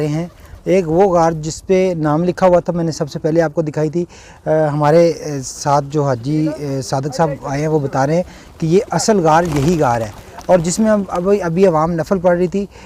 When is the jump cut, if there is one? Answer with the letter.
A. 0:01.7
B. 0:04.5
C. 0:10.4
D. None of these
D